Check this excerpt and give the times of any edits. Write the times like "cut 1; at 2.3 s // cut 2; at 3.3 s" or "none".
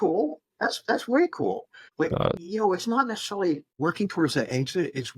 cut 1; at 2.0 s // cut 2; at 3.7 s